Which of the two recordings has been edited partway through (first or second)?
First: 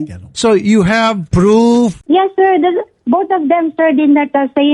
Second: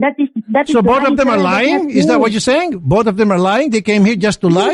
first